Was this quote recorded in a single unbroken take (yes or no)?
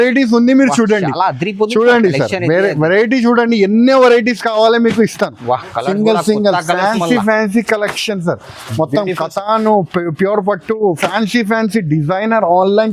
yes